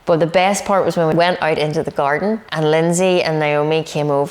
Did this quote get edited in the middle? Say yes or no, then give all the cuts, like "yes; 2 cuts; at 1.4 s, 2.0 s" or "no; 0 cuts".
yes; 2 cuts; at 1.1 s, 2.5 s